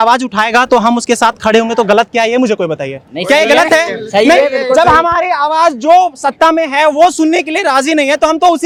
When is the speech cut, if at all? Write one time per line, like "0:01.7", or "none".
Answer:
none